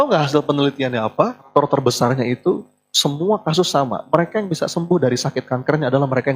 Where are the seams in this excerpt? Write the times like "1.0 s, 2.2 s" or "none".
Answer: 1.5 s